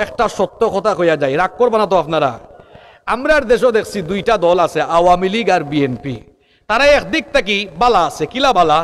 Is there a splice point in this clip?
no; 0 cuts

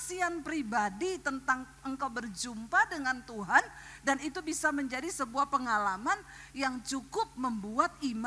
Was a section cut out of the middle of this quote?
no; 0 cuts

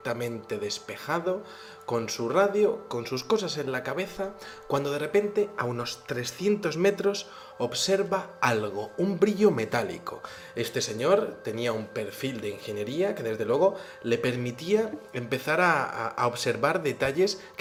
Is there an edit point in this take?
no; 0 cuts

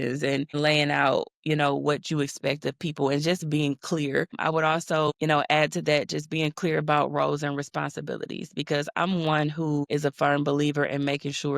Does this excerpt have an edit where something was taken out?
yes; 1 cut; at 5.2 s

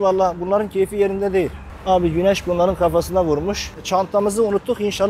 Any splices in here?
yes; 2 cuts; at 1.7 s, 3.7 s

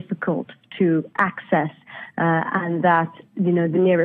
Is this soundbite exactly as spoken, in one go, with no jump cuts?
yes; 0 cuts

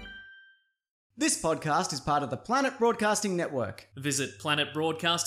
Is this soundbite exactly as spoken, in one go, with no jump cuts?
no; 1 cut; at 1.2 s

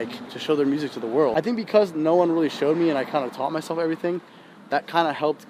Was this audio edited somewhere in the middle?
yes; 1 cut; at 1.3 s

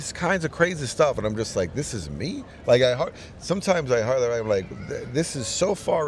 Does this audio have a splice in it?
no; 0 cuts

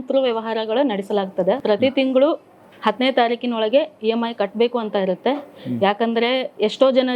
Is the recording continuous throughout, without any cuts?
no; 1 cut; at 1.6 s

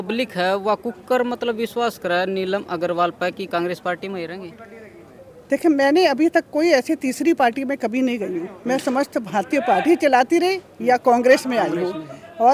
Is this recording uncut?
yes; 0 cuts

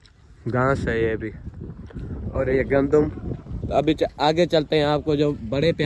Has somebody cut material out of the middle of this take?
no; 0 cuts

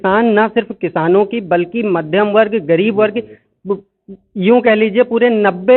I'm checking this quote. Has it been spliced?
no; 0 cuts

